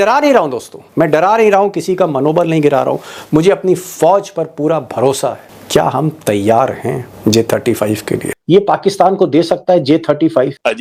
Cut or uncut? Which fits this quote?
cut